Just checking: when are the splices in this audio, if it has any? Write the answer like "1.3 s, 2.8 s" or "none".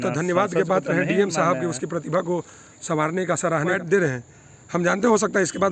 3.8 s